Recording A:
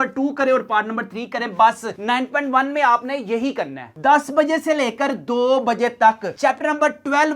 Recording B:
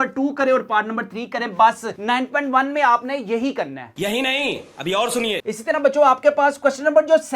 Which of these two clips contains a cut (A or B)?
A